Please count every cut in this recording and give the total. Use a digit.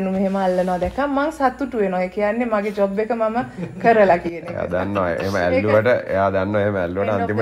0